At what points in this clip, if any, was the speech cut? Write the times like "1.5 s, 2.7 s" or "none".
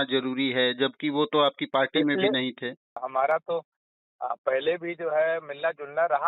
3.2 s